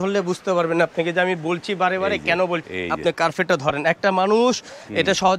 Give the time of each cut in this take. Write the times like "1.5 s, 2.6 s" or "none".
2.7 s

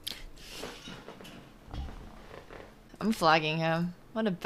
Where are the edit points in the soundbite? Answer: 2.9 s

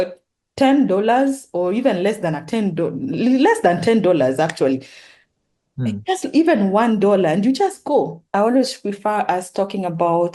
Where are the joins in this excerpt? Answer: 8.2 s

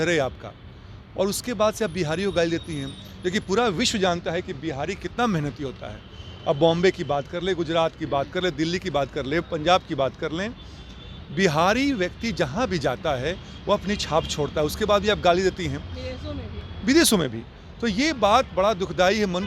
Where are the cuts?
none

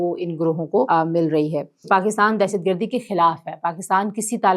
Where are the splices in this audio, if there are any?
0.9 s, 1.9 s

